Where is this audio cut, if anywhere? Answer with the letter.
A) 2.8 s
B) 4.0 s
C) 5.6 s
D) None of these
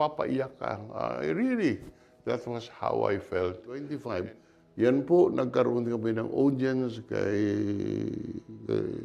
B